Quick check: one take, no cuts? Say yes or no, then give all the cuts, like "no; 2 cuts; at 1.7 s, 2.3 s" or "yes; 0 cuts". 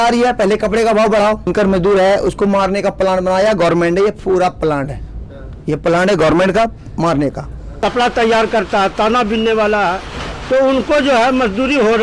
no; 2 cuts; at 1.5 s, 7.6 s